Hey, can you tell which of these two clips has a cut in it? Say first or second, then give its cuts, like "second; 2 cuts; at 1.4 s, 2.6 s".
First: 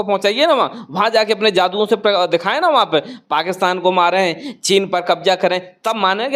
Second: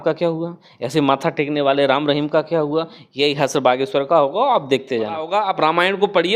second; 1 cut; at 5.3 s